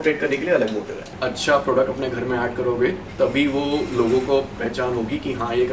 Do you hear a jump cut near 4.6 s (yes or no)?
no